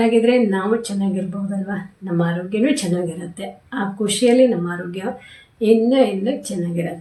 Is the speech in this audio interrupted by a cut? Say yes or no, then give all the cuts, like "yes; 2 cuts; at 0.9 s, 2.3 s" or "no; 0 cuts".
no; 0 cuts